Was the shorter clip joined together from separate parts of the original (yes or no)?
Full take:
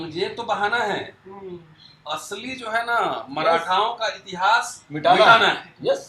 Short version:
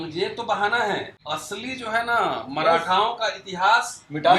yes